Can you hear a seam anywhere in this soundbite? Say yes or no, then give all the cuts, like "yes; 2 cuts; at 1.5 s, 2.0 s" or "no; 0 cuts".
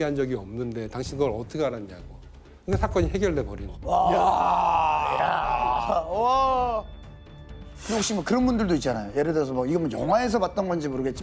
no; 0 cuts